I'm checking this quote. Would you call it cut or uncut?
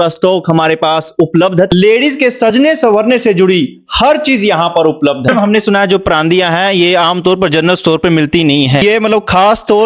cut